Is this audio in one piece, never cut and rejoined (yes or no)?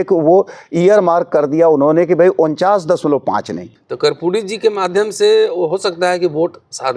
no